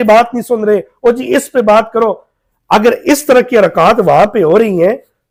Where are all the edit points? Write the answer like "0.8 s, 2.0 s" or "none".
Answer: none

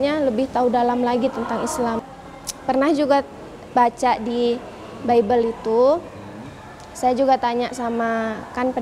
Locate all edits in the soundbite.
2.1 s

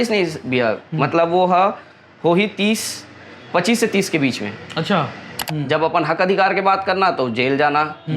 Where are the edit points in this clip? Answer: 5.4 s

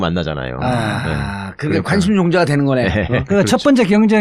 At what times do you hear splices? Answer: 2.1 s

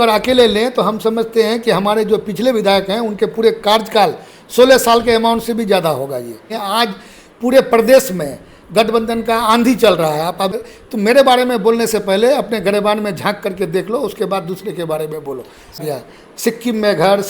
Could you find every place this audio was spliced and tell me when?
6.5 s, 10.6 s, 15.8 s

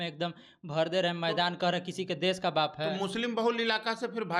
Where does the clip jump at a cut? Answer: none

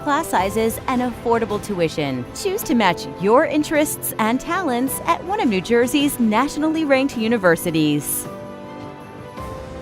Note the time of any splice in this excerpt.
8.1 s

